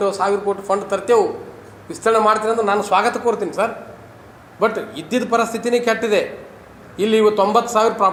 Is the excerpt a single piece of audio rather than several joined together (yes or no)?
yes